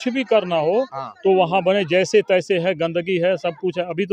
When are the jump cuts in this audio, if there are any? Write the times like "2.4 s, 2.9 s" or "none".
none